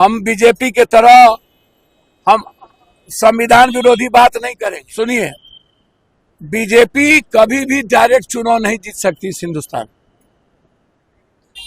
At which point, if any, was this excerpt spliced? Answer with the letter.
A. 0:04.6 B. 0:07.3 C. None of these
A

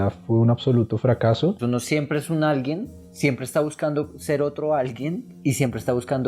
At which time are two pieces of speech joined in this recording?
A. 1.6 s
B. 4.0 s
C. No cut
A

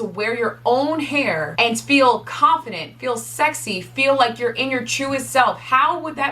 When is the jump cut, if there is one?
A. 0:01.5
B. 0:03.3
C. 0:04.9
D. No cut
A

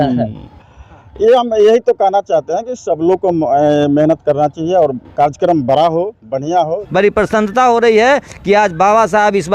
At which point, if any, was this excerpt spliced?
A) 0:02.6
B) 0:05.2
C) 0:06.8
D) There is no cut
C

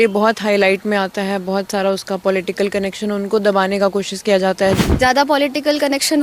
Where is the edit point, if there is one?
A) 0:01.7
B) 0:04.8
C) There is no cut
B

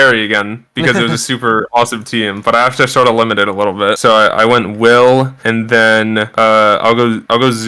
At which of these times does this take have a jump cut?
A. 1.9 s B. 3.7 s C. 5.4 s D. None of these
D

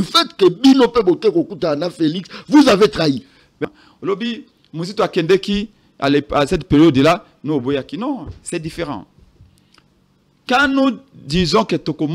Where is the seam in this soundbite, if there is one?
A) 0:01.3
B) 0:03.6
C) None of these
B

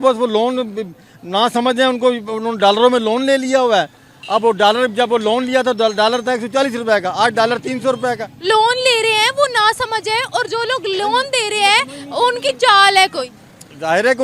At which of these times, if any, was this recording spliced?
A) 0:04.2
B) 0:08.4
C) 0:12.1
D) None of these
D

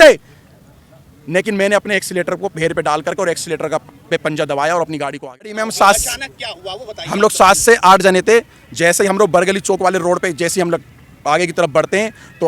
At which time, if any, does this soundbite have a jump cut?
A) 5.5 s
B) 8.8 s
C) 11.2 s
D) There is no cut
A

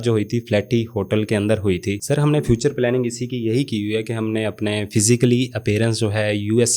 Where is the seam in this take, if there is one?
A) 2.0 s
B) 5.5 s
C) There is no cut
A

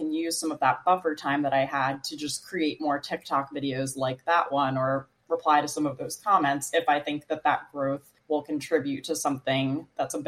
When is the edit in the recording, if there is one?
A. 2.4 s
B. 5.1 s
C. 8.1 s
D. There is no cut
C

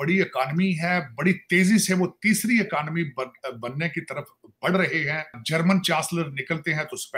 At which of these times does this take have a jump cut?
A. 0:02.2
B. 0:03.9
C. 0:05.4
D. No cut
C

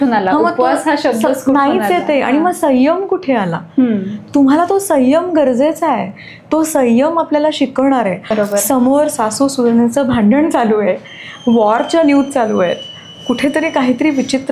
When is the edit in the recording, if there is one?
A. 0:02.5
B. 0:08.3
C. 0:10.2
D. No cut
B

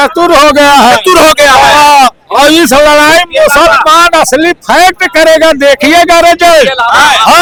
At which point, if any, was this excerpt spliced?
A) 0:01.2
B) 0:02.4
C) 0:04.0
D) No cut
D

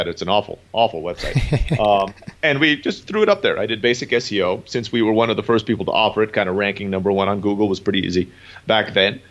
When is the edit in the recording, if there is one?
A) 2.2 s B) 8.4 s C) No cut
A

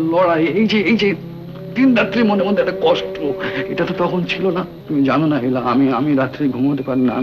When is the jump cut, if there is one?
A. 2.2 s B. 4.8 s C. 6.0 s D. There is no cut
B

